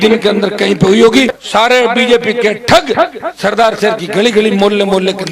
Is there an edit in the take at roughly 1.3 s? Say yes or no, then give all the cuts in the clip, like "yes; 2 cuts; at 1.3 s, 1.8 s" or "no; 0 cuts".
yes; 1 cut; at 1.3 s